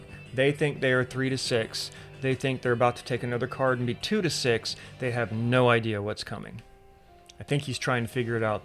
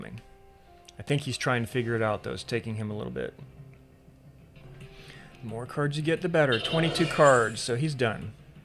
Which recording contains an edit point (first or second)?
second